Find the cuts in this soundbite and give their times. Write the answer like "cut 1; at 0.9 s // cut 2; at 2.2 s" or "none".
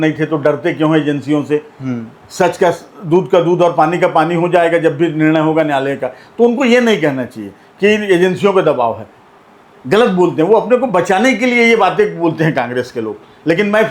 none